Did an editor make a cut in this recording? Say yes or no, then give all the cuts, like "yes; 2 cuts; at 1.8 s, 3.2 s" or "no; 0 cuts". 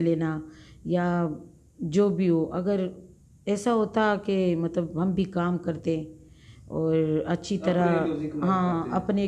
no; 0 cuts